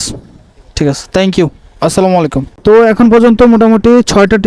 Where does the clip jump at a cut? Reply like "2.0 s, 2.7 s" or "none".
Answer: 2.6 s